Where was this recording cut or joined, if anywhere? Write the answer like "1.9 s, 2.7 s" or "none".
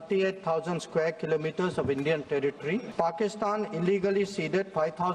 2.9 s